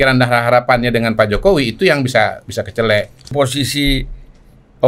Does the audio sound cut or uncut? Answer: cut